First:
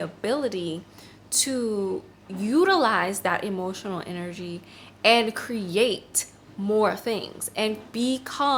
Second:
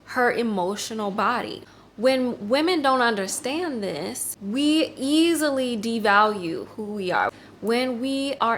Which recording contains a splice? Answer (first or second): second